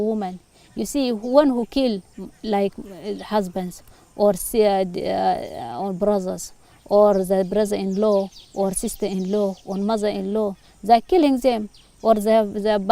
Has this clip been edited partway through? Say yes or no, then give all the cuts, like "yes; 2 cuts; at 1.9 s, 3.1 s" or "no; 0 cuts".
no; 0 cuts